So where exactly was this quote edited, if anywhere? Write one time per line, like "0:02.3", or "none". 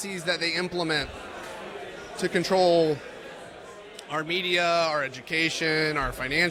none